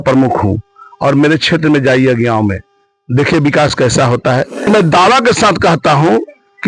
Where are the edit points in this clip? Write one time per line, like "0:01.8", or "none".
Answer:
0:04.7